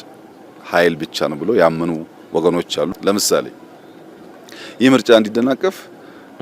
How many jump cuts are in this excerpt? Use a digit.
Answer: 1